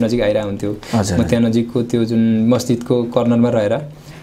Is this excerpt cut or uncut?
uncut